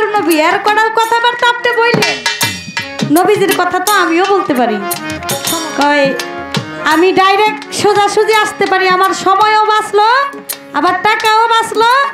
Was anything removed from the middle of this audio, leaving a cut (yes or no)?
yes